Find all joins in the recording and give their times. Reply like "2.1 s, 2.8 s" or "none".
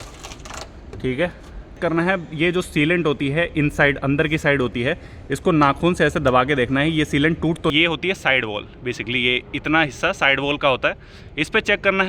1.7 s, 7.7 s